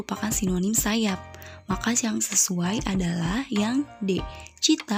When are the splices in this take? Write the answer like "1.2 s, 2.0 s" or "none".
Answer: none